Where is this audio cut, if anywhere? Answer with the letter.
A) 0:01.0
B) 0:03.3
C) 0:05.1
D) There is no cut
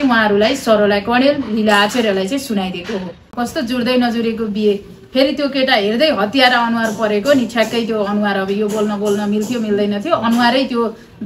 B